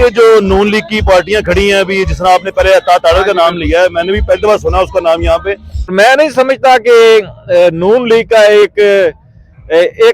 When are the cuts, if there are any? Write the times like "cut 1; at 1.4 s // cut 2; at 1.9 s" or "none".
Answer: cut 1; at 5.9 s